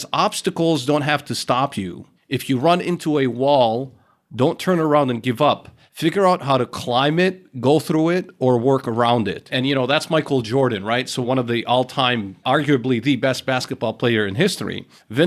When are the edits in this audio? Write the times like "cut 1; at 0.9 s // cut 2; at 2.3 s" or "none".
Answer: none